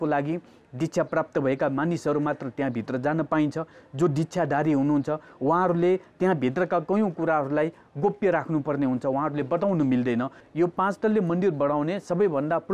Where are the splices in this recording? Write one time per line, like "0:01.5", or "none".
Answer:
0:10.4

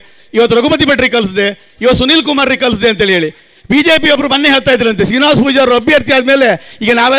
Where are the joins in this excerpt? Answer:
none

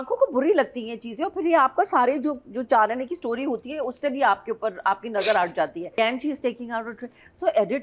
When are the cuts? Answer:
0:06.0

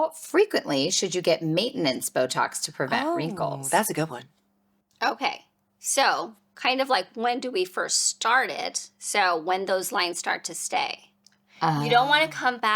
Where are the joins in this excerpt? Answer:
none

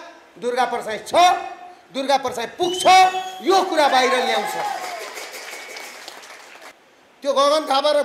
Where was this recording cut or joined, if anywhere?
0:06.8

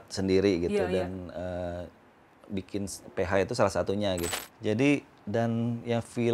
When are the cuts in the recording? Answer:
0:04.4

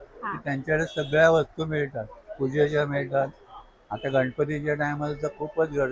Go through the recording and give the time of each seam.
none

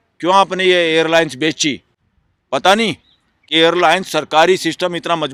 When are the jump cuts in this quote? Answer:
none

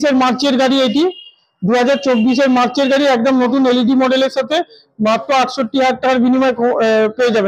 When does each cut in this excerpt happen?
none

